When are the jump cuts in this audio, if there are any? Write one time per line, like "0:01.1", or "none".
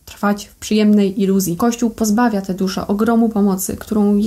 0:01.6